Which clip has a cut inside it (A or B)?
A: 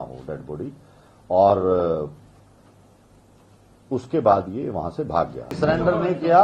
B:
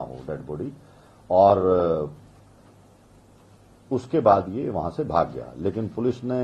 A